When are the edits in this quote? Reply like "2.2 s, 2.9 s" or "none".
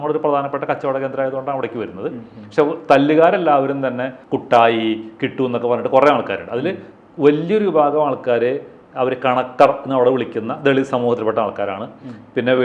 4.2 s